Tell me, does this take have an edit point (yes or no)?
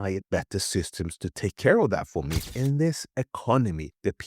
yes